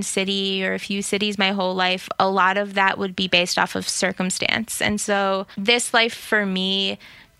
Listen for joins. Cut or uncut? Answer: cut